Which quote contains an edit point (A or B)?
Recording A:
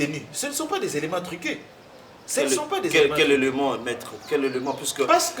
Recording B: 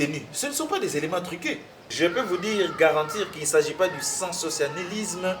B